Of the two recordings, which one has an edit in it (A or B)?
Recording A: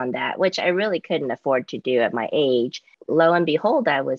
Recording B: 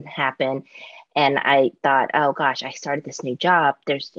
A